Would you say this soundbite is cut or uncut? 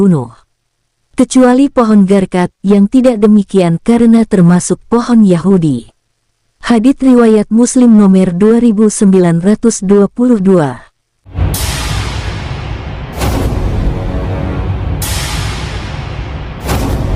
cut